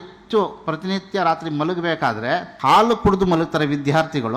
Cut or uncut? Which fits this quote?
cut